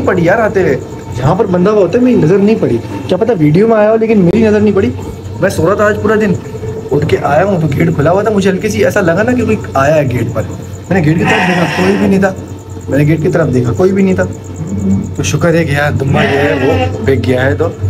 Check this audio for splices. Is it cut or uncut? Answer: uncut